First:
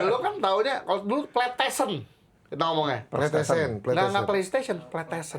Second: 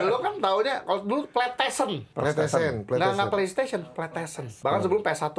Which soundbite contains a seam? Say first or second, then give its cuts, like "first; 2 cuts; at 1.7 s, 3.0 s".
second; 2 cuts; at 2.1 s, 4.5 s